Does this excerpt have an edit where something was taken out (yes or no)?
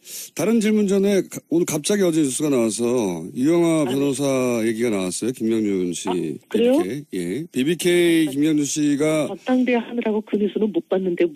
no